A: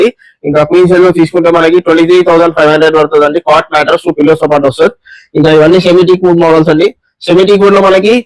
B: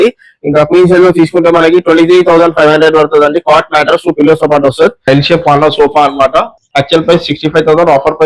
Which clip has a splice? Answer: B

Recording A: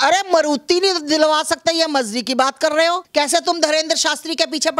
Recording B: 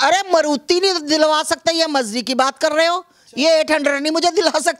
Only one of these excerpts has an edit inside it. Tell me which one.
A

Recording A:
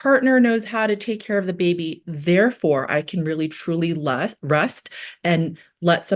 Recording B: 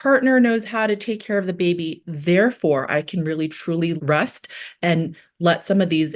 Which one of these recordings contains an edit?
B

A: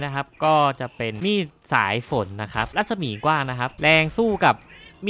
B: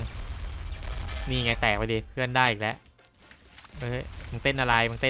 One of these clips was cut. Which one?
A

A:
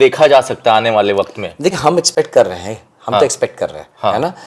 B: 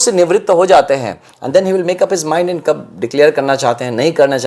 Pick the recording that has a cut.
A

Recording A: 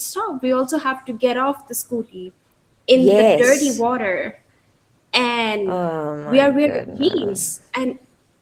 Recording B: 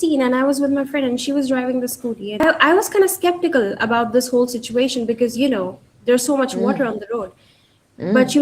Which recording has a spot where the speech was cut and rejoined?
B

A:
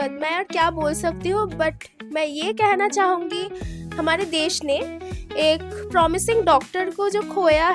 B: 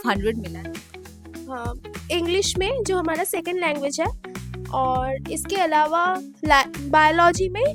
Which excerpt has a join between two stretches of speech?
A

